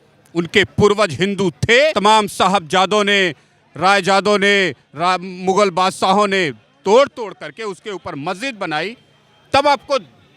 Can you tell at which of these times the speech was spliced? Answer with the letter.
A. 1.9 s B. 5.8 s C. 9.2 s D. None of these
A